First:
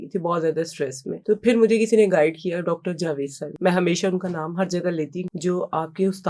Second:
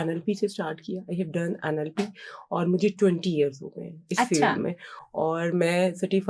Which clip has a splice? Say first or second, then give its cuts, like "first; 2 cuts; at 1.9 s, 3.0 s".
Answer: first; 3 cuts; at 1.1 s, 3.4 s, 5.2 s